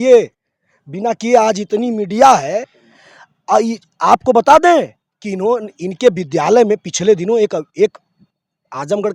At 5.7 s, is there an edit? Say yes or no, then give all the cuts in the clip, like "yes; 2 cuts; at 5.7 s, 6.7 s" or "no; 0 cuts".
no; 1 cut; at 2.8 s